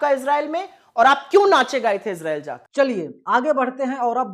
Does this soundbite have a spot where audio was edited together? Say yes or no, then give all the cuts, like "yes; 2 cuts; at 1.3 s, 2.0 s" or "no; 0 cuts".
no; 0 cuts